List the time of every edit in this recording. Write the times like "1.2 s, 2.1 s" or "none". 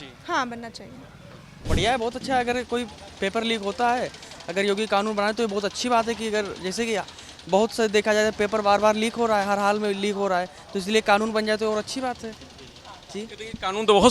none